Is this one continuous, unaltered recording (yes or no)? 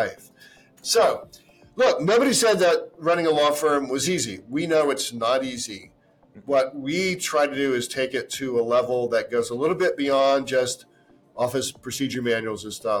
yes